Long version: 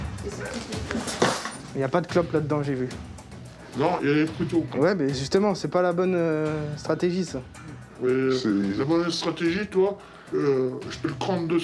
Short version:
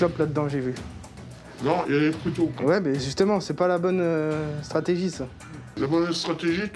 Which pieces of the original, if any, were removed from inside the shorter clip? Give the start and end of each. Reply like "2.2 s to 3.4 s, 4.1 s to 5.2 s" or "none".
7.9 s to 8.7 s